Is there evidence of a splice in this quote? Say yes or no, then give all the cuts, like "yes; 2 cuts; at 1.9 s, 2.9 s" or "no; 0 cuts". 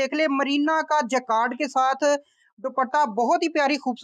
no; 0 cuts